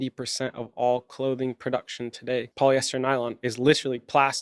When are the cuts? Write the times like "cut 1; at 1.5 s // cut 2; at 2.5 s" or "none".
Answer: cut 1; at 2.5 s